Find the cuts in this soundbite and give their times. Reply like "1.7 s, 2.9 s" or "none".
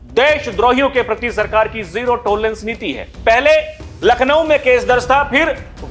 3.0 s